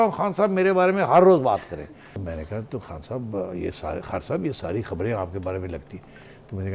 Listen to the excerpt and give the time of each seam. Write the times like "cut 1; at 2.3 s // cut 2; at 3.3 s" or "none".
cut 1; at 2.2 s